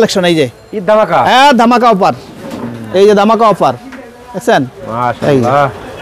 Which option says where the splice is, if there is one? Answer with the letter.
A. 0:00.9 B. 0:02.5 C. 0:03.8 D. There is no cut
D